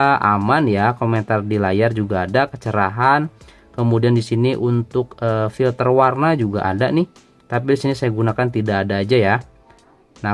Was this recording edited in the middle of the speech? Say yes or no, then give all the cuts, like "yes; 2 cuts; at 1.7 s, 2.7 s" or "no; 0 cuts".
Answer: no; 0 cuts